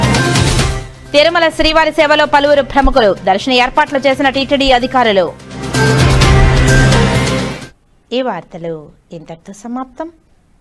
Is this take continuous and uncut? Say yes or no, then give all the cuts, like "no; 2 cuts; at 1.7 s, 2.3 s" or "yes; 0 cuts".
yes; 0 cuts